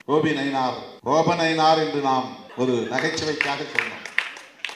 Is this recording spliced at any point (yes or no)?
yes